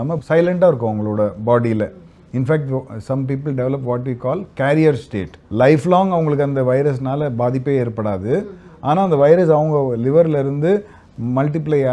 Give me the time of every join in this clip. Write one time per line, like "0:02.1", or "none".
none